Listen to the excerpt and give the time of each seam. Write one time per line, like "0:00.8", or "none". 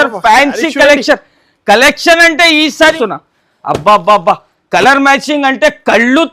0:03.0